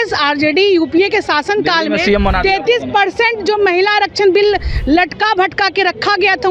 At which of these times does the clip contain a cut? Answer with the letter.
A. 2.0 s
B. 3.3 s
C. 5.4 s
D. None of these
D